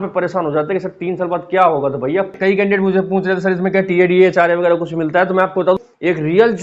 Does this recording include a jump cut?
yes; 2 cuts; at 2.3 s, 5.8 s

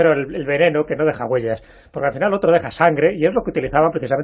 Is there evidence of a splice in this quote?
yes; 1 cut; at 1.2 s

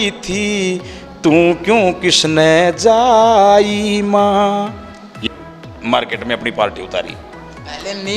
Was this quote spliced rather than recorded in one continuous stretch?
yes; 1 cut; at 5.1 s

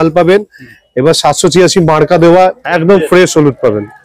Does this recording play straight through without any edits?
no; 1 cut; at 2.6 s

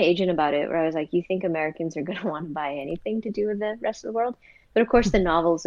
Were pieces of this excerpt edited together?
no; 0 cuts

